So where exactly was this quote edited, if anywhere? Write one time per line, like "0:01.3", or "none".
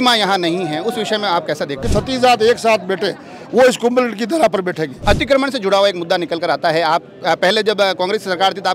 0:01.8
0:04.9